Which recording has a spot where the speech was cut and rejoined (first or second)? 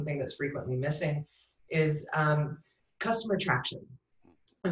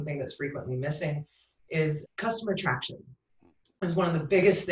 second